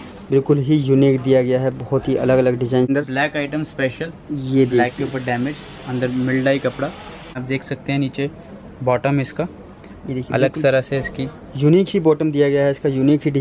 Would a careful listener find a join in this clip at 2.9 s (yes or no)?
yes